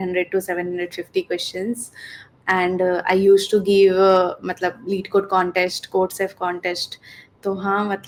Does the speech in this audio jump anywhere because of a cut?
no; 0 cuts

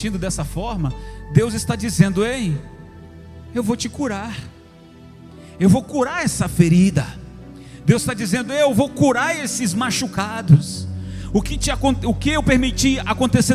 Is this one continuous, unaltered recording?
yes; 0 cuts

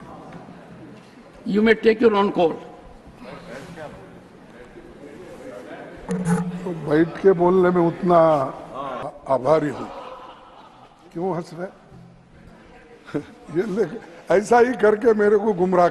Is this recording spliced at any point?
yes; 1 cut; at 9.1 s

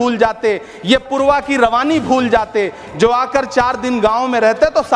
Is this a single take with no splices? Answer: yes; 0 cuts

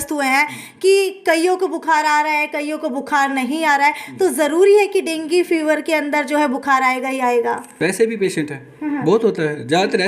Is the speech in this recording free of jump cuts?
no; 1 cut; at 7.7 s

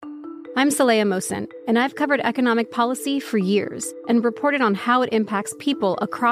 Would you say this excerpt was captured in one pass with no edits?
no; 1 cut; at 3.9 s

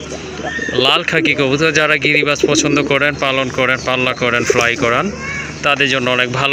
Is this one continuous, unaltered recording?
yes; 0 cuts

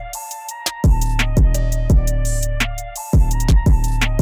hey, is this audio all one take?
yes; 0 cuts

